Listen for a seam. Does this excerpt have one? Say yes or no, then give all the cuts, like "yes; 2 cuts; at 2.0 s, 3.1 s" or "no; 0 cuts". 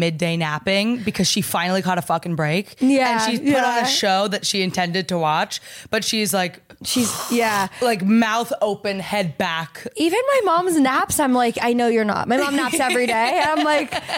no; 0 cuts